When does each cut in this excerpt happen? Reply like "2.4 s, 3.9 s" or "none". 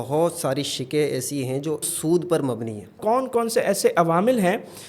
1.9 s, 3.0 s